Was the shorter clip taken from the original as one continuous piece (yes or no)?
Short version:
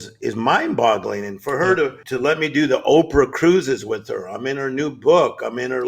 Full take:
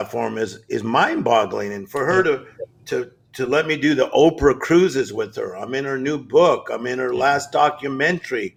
no